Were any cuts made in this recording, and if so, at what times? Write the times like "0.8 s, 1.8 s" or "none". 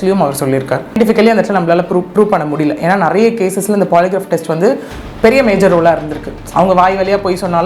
1.0 s